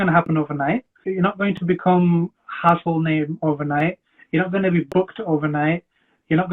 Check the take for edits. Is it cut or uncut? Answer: cut